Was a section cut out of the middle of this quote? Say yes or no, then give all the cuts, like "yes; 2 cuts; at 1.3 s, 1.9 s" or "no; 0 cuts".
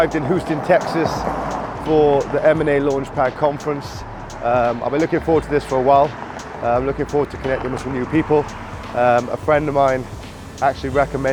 no; 0 cuts